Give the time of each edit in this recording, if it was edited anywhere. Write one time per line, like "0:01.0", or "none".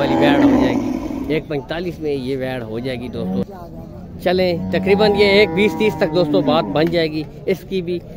0:03.4